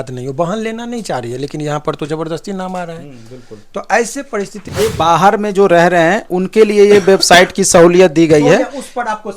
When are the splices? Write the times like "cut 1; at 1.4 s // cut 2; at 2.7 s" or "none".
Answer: cut 1; at 4.7 s